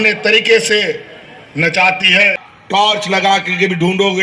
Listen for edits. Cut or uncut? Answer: cut